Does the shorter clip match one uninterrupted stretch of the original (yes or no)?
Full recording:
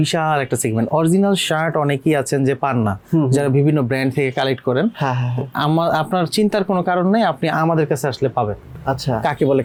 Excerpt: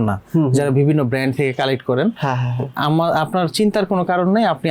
yes